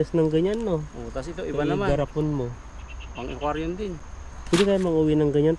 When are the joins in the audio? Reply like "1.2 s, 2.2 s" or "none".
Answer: none